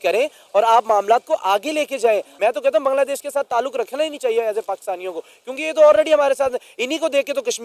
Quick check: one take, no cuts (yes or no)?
no